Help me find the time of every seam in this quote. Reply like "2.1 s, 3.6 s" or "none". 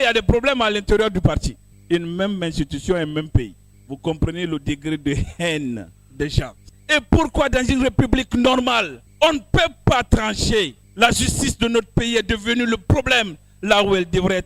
6.6 s